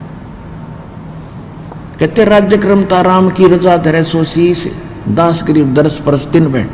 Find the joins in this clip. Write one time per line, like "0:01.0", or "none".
0:01.0